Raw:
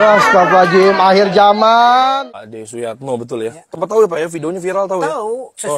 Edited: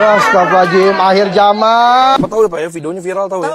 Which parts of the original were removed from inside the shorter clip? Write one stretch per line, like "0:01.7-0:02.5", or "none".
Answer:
0:02.2-0:03.8